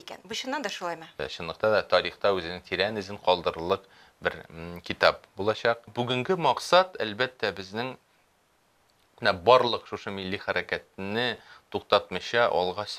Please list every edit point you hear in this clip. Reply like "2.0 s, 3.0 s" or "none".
1.2 s, 5.9 s